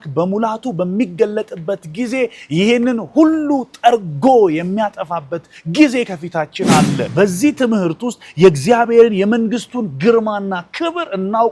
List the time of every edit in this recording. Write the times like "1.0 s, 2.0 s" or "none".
7.0 s